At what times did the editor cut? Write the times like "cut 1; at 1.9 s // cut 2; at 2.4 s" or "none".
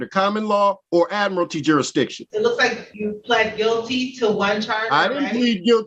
cut 1; at 0.8 s // cut 2; at 2.2 s // cut 3; at 2.9 s